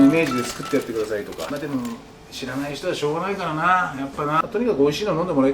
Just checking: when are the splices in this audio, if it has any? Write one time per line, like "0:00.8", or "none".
0:01.5
0:04.5